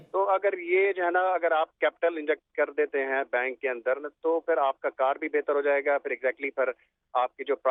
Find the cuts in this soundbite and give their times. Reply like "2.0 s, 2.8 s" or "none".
none